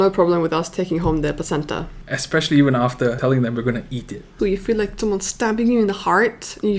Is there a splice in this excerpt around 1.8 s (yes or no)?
no